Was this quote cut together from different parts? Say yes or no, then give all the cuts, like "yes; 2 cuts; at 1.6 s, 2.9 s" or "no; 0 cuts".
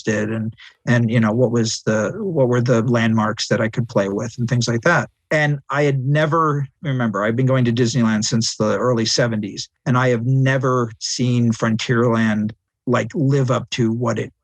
no; 0 cuts